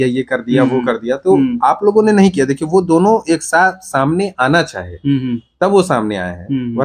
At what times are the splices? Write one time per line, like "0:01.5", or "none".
none